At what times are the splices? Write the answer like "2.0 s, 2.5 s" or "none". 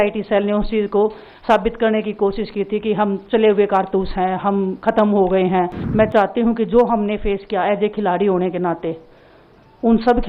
5.8 s